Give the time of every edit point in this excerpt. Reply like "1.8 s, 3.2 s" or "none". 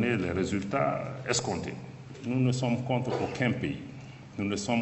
2.1 s